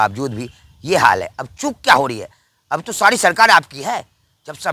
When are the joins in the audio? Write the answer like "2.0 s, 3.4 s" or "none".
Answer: none